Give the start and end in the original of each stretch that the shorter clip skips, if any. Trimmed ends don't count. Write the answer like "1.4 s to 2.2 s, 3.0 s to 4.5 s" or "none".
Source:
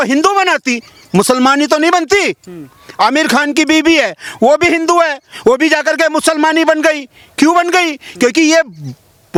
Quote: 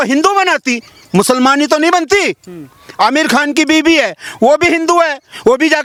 none